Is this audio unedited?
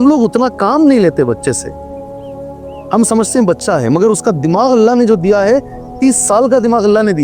no; 2 cuts; at 1.6 s, 2.9 s

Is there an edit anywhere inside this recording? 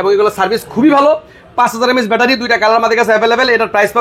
no; 0 cuts

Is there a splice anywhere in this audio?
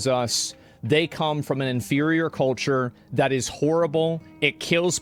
no; 0 cuts

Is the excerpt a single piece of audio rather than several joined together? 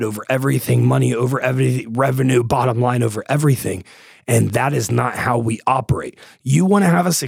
yes; 0 cuts

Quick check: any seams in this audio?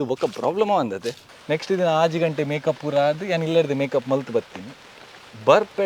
yes; 1 cut; at 1.2 s

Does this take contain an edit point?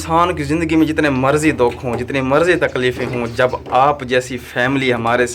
no; 0 cuts

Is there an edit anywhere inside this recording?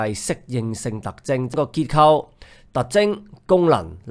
no; 0 cuts

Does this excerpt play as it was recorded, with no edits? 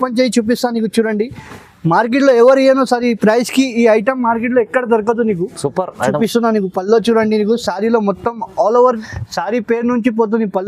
no; 1 cut; at 9.0 s

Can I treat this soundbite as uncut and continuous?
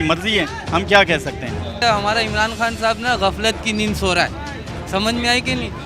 no; 1 cut; at 1.8 s

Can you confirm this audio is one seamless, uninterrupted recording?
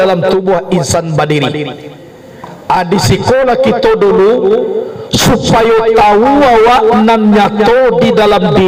yes; 0 cuts

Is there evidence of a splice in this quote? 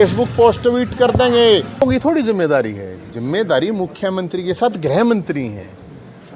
yes; 1 cut; at 1.8 s

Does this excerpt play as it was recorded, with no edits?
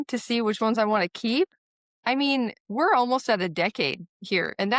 yes; 0 cuts

